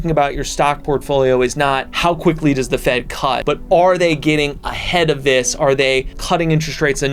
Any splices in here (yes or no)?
yes